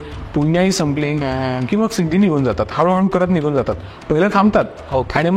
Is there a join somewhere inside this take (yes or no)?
yes